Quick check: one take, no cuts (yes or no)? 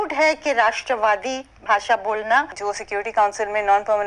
no